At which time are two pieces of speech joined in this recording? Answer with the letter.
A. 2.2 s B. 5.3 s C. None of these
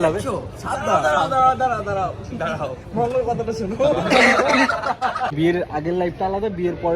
B